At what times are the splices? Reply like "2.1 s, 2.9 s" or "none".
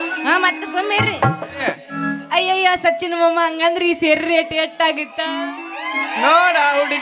1.7 s